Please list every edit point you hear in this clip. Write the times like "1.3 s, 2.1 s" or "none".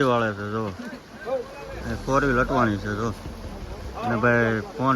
none